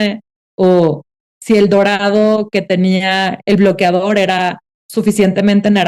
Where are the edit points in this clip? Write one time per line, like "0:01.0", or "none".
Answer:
none